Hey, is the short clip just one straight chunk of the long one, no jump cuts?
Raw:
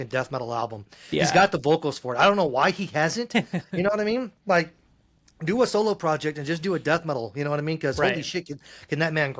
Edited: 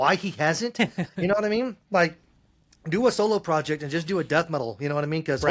yes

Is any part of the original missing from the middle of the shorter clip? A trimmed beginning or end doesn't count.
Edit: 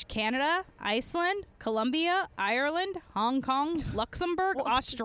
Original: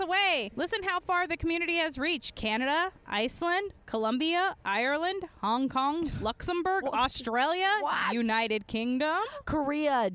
no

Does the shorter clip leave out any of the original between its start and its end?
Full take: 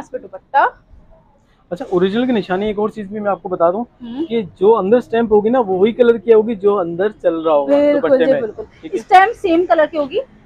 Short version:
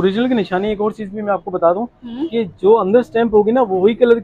no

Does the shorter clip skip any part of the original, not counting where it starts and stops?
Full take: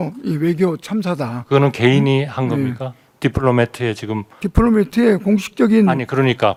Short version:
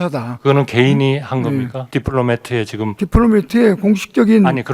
yes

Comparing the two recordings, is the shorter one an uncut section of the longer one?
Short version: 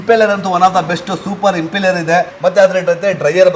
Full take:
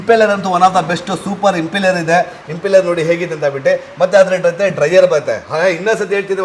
no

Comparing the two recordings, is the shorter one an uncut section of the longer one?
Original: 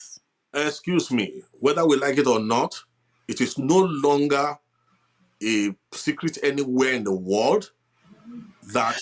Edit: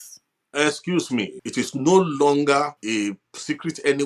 no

